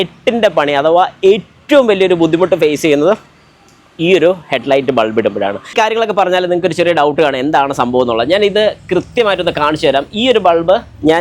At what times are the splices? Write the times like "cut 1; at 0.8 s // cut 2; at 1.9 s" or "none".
cut 1; at 5.7 s